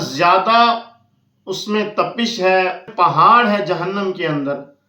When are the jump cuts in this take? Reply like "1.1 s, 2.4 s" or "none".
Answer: 2.9 s